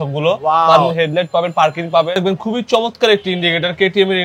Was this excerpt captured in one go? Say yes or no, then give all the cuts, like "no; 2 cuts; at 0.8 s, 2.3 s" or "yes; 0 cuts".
no; 2 cuts; at 0.9 s, 2.1 s